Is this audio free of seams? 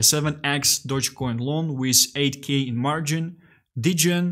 yes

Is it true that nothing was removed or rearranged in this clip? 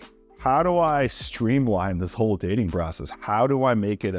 yes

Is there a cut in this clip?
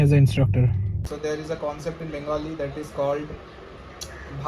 yes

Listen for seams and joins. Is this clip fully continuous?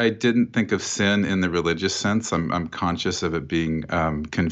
yes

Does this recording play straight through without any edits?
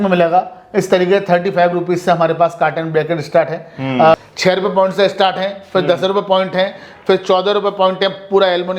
no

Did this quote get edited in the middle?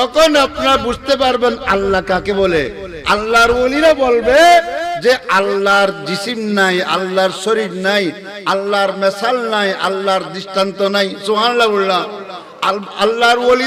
no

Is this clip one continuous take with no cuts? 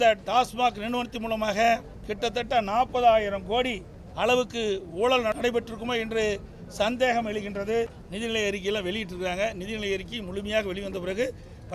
no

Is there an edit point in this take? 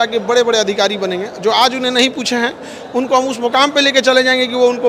no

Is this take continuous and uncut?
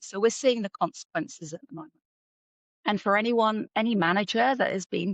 yes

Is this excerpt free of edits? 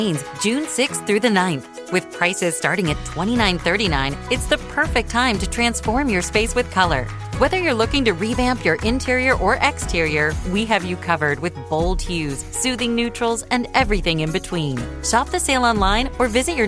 yes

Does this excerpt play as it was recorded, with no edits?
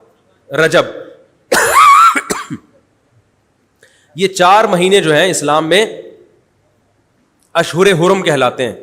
yes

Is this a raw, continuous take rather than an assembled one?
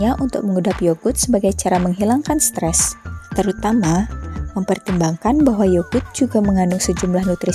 yes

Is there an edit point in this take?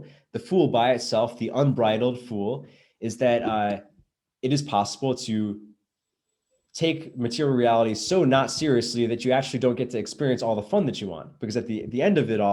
no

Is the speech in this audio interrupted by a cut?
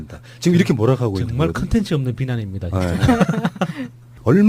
yes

